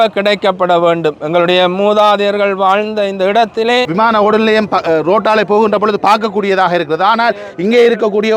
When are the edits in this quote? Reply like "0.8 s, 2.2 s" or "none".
3.9 s